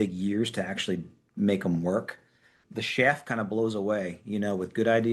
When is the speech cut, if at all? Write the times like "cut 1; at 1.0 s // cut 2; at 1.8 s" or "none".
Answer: cut 1; at 2.6 s